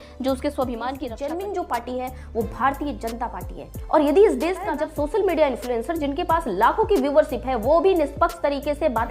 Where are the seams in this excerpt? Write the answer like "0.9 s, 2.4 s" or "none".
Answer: 1.1 s, 4.7 s